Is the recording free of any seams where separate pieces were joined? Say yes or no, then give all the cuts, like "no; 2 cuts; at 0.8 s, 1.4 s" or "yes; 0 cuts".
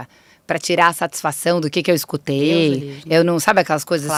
yes; 0 cuts